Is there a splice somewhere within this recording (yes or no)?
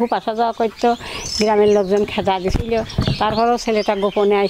no